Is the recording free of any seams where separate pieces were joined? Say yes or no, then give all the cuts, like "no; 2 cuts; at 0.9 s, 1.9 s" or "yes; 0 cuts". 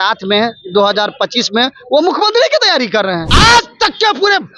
no; 1 cut; at 3.3 s